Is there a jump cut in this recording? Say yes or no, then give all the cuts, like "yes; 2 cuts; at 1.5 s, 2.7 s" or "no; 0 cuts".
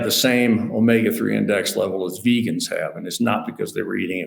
no; 0 cuts